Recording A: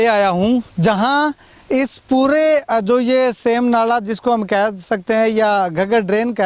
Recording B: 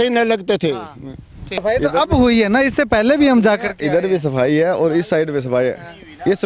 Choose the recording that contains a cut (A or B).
B